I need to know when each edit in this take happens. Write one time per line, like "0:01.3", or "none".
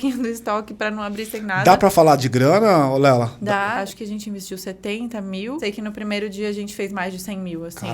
0:03.8
0:05.6